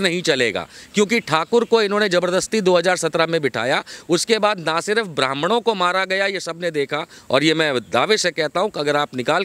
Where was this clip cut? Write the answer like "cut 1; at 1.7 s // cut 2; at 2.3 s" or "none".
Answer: none